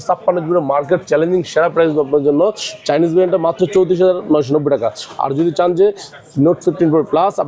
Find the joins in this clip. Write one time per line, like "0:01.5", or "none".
none